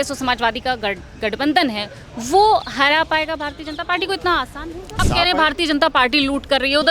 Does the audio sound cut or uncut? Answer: cut